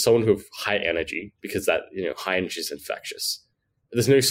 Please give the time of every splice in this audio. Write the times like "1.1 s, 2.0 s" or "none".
none